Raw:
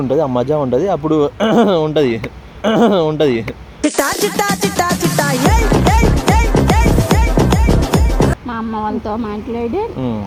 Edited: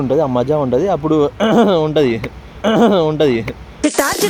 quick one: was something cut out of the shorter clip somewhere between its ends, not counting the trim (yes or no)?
no